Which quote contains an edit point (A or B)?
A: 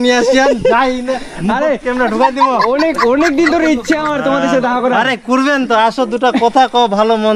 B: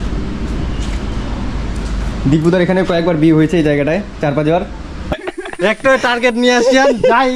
B